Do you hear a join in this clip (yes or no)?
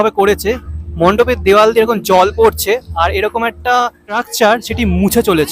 yes